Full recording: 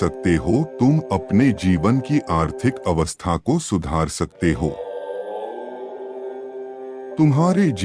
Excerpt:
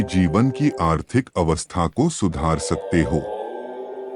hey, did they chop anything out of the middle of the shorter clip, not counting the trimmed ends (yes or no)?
yes